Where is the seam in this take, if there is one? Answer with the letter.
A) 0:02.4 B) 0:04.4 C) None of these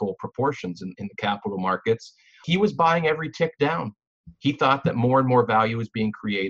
A